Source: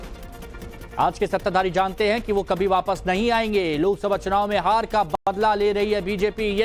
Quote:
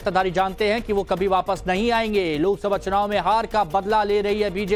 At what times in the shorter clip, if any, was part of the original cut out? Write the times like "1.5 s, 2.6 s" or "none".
3.8 s